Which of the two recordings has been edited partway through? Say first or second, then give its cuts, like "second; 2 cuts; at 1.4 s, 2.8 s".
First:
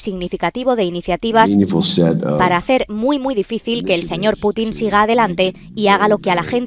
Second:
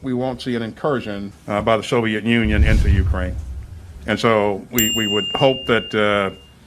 second; 1 cut; at 3.4 s